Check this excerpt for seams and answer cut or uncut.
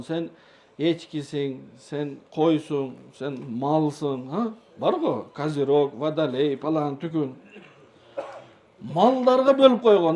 uncut